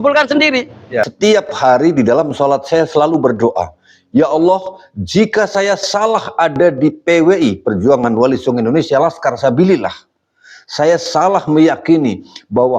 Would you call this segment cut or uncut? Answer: cut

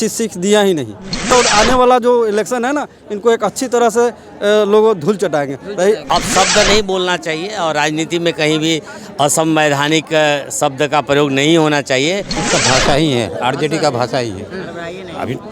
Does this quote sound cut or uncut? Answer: cut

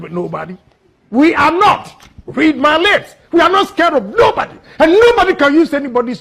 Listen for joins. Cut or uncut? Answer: uncut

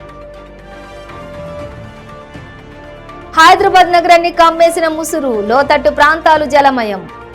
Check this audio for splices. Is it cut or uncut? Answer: uncut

